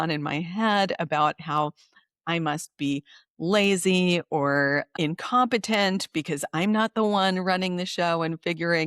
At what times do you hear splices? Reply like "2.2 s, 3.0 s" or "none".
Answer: 4.9 s